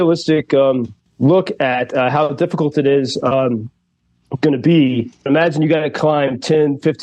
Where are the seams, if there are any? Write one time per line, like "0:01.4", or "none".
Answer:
0:01.0
0:05.3